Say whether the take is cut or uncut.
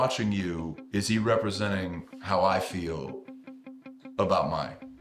uncut